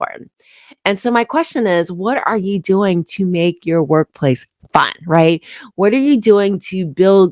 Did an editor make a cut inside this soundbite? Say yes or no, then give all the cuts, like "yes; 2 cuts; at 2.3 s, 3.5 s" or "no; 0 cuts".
no; 0 cuts